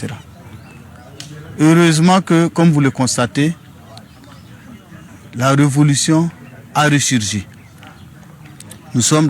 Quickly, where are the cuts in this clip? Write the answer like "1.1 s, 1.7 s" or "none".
none